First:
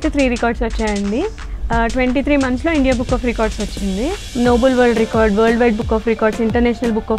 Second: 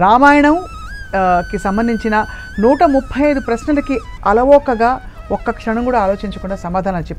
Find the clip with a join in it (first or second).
first